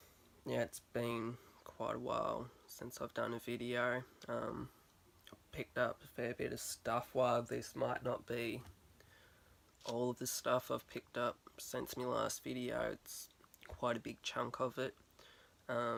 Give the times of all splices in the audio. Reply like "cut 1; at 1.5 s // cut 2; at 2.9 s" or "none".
none